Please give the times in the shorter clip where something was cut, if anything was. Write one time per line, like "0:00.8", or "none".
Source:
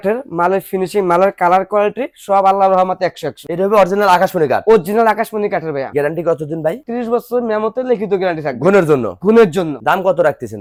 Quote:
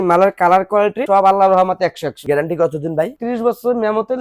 0:01.0
0:02.2